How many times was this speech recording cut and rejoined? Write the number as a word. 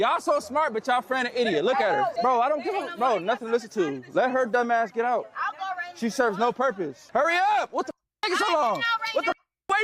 two